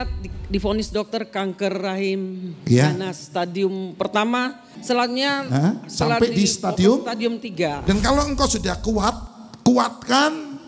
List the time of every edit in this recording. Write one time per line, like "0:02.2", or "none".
0:04.7
0:07.8